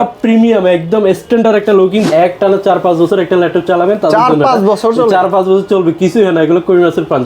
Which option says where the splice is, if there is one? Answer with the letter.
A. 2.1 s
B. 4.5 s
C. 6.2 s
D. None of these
A